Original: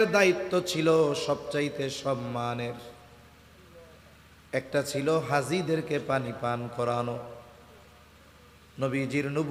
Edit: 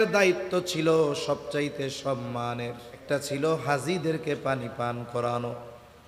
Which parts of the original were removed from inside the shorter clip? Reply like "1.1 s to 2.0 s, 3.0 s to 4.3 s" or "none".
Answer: 3.0 s to 4.7 s